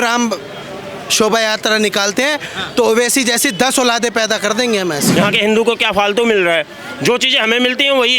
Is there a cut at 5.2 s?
yes; 1 cut; at 5.2 s

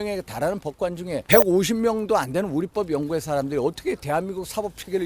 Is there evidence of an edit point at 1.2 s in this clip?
yes; 1 cut; at 1.2 s

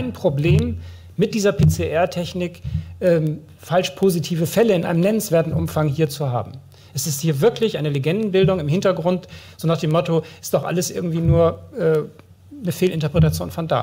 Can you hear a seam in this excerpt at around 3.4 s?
no; 0 cuts

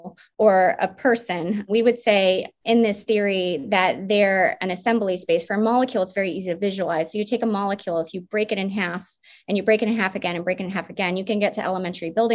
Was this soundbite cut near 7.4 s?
no; 2 cuts; at 1.6 s, 2.5 s

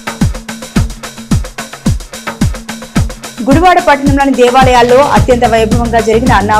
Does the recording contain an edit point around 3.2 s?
no; 1 cut; at 1.4 s

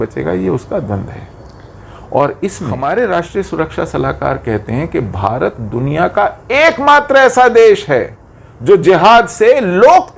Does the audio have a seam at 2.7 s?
yes; 1 cut; at 2.7 s

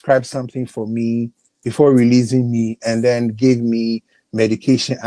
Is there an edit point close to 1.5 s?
yes; 1 cut; at 1.5 s

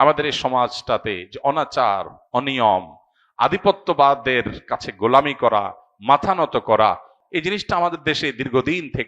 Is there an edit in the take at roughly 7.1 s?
yes; 1 cut; at 7.1 s

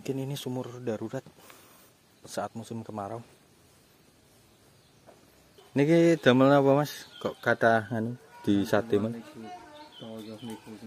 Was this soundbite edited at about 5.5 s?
yes; 1 cut; at 5.5 s

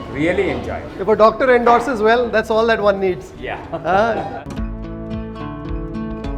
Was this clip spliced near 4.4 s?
yes; 2 cuts; at 0.9 s, 4.4 s

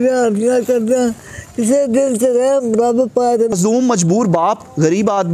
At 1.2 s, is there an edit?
no; 1 cut; at 3.6 s

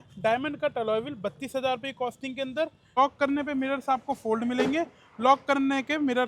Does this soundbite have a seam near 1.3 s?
no; 1 cut; at 2.9 s

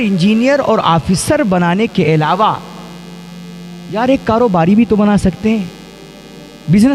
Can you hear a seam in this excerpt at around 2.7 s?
no; 0 cuts

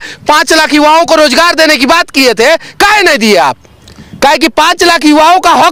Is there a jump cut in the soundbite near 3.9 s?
no; 0 cuts

